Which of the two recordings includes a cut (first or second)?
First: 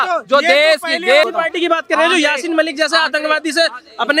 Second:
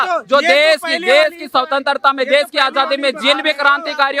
first